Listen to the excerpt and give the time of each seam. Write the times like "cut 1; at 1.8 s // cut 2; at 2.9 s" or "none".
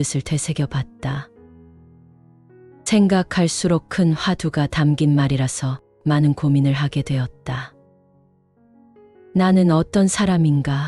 cut 1; at 7.7 s // cut 2; at 9.2 s